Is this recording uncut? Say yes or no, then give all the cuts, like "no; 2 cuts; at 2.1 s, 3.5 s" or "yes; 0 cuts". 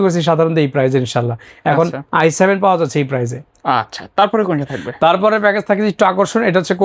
yes; 0 cuts